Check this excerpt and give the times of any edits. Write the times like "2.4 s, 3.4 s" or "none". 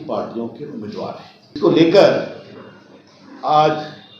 1.6 s